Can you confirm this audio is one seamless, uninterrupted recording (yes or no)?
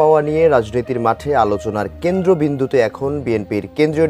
yes